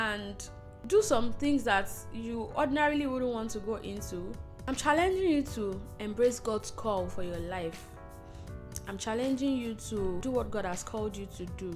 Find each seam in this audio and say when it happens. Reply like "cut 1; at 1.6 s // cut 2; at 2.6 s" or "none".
cut 1; at 0.9 s // cut 2; at 4.5 s // cut 3; at 10.2 s